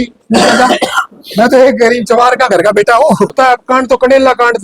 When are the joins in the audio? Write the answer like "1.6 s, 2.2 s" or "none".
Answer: 3.3 s